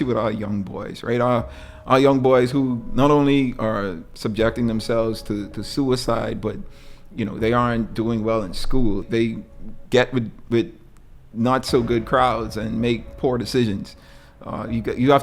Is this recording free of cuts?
no; 2 cuts; at 4.0 s, 9.0 s

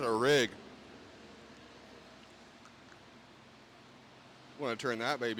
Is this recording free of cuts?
yes; 0 cuts

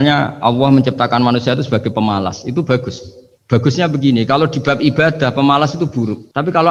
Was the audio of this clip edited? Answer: no; 0 cuts

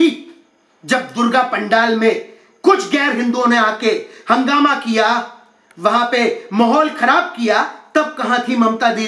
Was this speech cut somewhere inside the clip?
no; 0 cuts

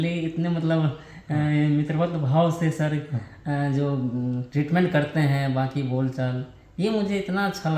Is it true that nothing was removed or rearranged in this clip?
yes; 0 cuts

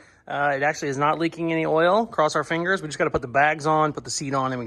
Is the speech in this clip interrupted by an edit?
no; 0 cuts

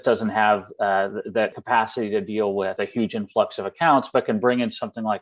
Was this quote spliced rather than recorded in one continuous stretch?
yes; 2 cuts; at 1.5 s, 2.8 s

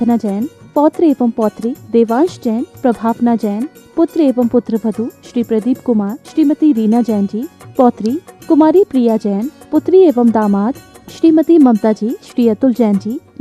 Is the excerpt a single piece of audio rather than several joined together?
yes; 0 cuts

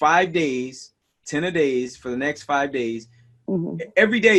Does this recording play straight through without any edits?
yes; 0 cuts

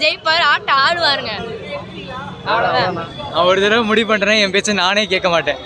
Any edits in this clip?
no; 0 cuts

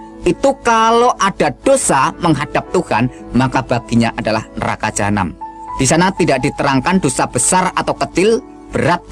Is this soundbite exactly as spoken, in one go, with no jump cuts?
yes; 0 cuts

